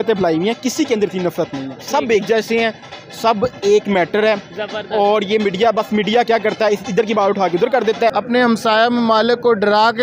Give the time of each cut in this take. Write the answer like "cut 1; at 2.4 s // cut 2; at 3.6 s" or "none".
cut 1; at 8.1 s

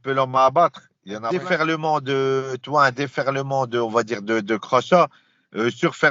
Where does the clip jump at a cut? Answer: cut 1; at 1.3 s

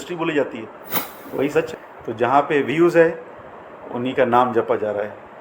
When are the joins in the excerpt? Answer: cut 1; at 1.7 s

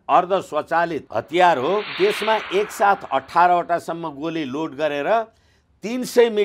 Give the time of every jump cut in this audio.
cut 1; at 1.0 s // cut 2; at 1.9 s

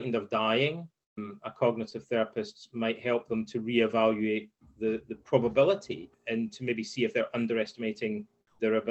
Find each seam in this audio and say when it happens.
cut 1; at 1.3 s // cut 2; at 6.2 s

